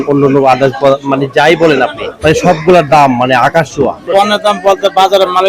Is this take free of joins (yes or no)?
no